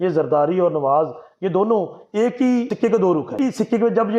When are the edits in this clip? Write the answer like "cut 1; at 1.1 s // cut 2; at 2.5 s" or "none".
cut 1; at 2.7 s // cut 2; at 3.3 s